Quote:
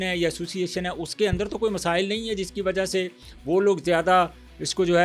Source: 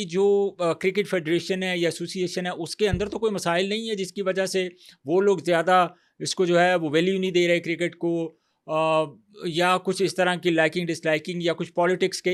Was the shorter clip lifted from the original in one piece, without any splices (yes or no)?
yes